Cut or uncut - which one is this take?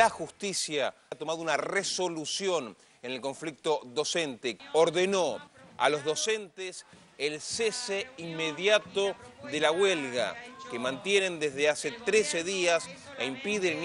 uncut